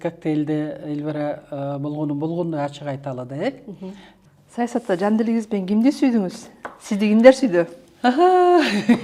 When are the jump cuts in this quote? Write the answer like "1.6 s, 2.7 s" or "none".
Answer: 4.1 s